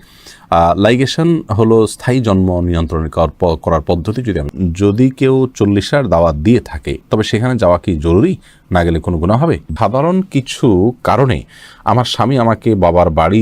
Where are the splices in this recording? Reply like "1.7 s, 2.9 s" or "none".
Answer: 4.5 s, 9.7 s